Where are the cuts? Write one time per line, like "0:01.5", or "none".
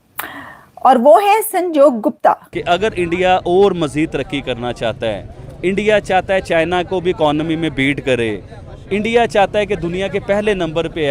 0:02.5